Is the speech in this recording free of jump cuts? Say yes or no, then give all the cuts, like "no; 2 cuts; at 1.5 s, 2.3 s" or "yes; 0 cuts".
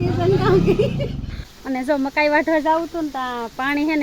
no; 1 cut; at 1.5 s